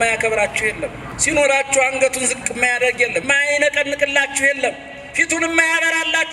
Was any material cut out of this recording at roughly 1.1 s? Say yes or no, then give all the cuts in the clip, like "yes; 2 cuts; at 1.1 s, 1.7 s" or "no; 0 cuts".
yes; 2 cuts; at 1.1 s, 3.2 s